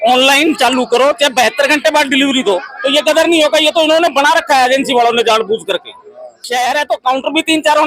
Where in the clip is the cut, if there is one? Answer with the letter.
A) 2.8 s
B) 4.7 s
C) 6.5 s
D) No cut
C